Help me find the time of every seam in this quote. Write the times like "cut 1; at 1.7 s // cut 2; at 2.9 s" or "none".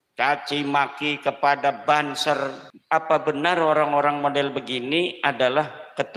cut 1; at 2.7 s